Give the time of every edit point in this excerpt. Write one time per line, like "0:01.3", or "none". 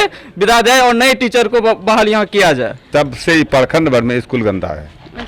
0:02.8